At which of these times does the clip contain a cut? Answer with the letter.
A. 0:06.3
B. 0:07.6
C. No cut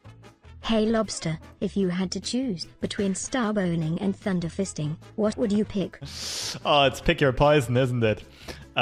C